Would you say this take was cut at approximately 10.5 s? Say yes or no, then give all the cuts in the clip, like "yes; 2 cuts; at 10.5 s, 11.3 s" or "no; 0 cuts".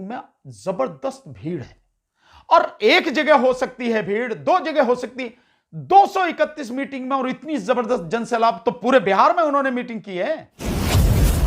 yes; 1 cut; at 10.5 s